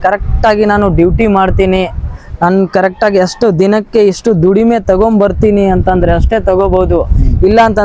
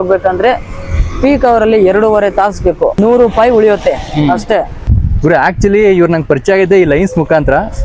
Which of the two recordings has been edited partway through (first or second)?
second